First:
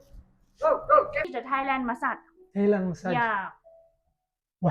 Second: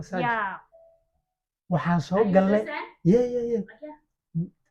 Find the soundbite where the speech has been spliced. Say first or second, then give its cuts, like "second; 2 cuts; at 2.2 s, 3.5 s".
first; 1 cut; at 1.2 s